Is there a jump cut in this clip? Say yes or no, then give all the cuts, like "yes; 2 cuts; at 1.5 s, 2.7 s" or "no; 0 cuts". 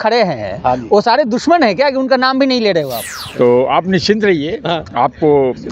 yes; 1 cut; at 3.0 s